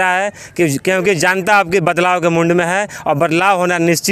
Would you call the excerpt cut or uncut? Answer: uncut